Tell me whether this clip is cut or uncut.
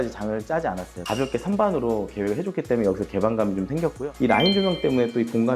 cut